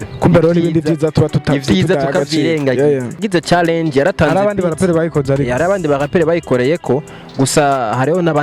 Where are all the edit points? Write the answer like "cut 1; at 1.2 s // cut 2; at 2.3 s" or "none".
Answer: cut 1; at 3.2 s